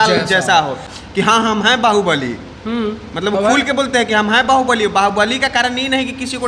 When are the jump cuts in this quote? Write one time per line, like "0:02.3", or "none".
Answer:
0:00.9